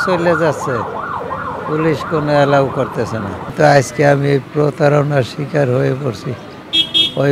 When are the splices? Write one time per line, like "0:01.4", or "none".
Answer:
0:03.5